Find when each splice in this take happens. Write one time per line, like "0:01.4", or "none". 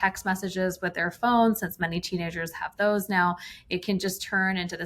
none